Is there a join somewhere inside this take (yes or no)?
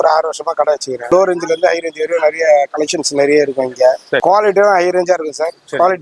yes